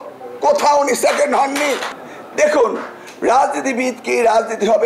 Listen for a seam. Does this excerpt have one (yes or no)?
yes